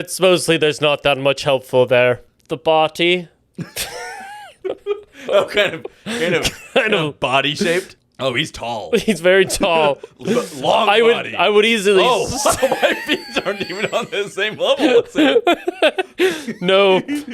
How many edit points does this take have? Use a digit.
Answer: 2